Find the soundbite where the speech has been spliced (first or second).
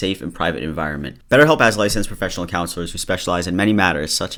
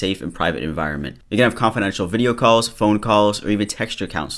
second